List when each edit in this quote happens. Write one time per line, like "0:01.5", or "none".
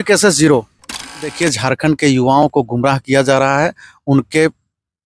0:01.3